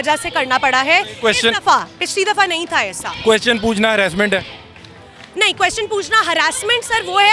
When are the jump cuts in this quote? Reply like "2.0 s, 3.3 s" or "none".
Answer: none